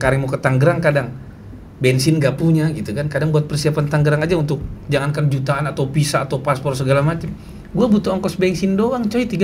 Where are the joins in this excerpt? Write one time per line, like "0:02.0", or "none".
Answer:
none